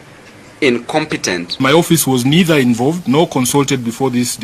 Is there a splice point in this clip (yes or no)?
yes